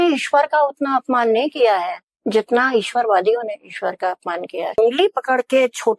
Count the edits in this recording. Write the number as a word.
one